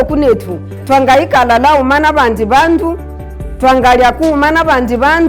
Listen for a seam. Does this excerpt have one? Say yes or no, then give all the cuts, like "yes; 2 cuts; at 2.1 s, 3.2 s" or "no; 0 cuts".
no; 0 cuts